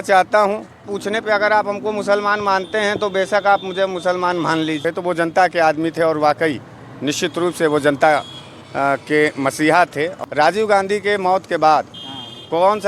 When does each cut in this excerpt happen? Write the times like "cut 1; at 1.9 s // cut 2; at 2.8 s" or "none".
cut 1; at 0.9 s // cut 2; at 4.8 s // cut 3; at 10.2 s